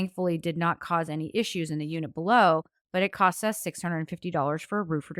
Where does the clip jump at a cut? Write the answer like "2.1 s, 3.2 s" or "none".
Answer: none